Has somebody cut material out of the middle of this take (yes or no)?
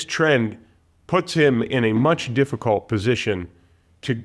no